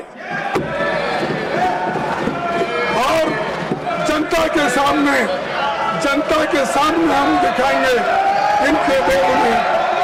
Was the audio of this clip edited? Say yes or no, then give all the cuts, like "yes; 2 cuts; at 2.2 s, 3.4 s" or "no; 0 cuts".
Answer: no; 0 cuts